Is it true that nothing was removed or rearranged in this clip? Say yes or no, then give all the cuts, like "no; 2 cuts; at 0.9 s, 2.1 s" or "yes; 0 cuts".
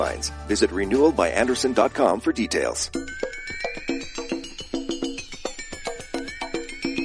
no; 1 cut; at 2.8 s